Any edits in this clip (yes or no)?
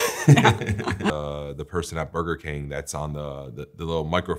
yes